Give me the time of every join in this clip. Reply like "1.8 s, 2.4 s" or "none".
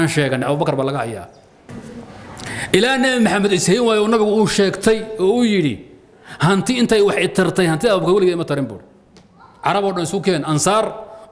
1.7 s